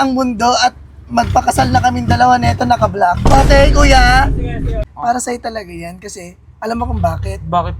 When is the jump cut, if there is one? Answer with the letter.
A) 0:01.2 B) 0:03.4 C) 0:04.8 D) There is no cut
C